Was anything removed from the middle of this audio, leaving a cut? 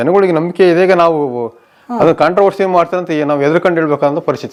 no; 0 cuts

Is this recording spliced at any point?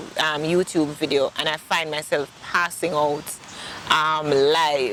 no; 0 cuts

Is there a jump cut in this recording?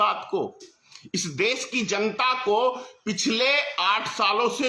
no; 0 cuts

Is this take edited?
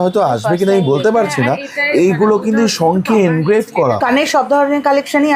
yes; 1 cut; at 4.0 s

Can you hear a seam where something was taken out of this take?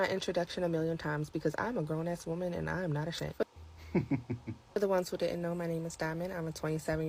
no; 0 cuts

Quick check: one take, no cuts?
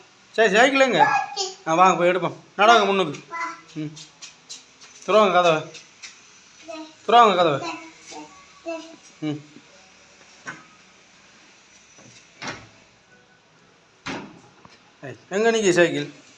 yes; 0 cuts

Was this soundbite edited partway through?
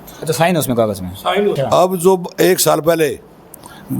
yes; 1 cut; at 1.6 s

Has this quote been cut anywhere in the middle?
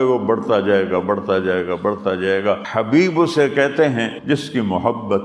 yes; 2 cuts; at 2.7 s, 4.2 s

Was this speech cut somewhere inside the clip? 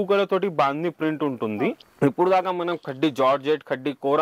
yes; 1 cut; at 1.8 s

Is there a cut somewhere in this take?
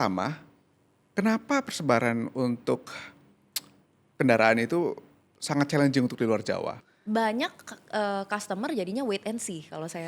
yes; 1 cut; at 6.9 s

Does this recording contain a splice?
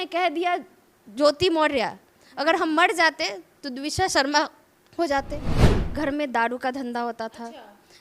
yes; 1 cut; at 5.7 s

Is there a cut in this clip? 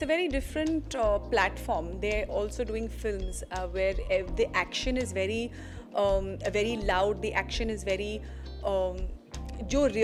no; 0 cuts

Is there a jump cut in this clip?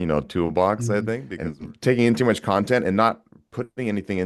yes; 1 cut; at 1.3 s

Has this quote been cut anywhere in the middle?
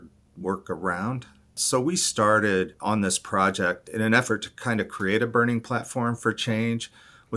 yes; 3 cuts; at 1.6 s, 2.8 s, 3.8 s

